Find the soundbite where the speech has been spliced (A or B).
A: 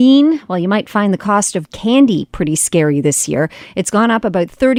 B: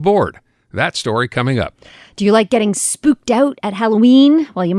B